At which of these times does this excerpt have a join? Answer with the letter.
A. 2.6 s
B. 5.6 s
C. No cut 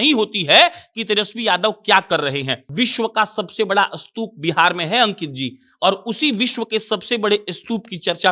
A